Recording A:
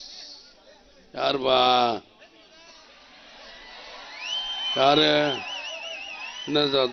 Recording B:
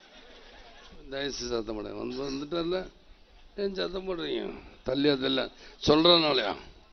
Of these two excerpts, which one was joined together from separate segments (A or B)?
B